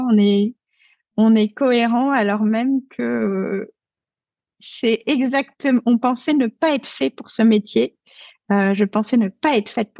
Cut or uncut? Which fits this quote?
uncut